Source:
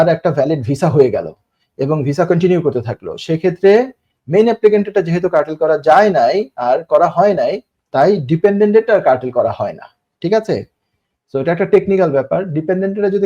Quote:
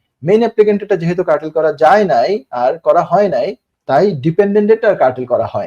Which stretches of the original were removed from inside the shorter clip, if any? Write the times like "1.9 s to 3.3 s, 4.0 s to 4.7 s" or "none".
none